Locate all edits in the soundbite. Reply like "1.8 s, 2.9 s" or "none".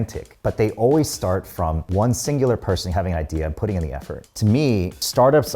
4.2 s